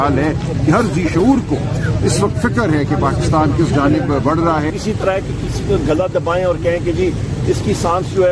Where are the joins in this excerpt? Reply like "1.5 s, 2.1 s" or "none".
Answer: 4.7 s

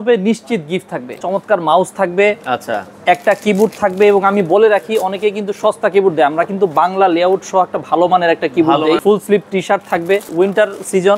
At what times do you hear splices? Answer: 1.2 s, 9.0 s, 10.3 s

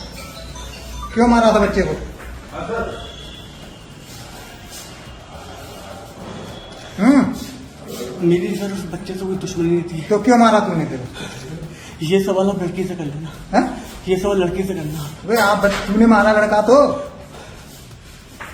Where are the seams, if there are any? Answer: none

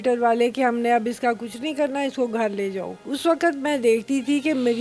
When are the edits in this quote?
3.0 s

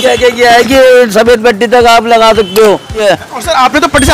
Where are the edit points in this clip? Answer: 3.0 s

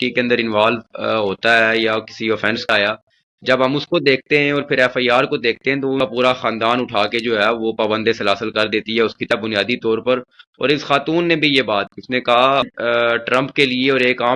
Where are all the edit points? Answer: 2.7 s, 6.0 s, 9.3 s, 12.7 s

